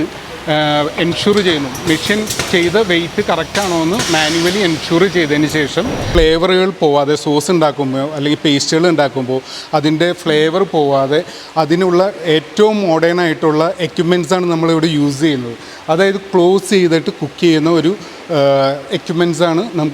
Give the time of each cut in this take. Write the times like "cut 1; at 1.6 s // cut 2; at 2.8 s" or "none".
cut 1; at 6.1 s